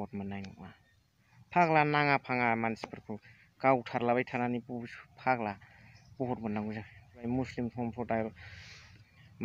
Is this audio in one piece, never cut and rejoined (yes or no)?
no